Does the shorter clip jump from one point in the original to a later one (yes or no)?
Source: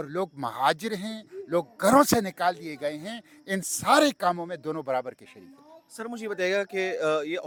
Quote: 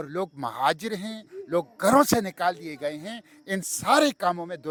no